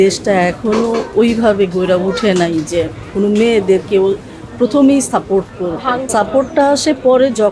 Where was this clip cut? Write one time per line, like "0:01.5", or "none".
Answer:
0:06.1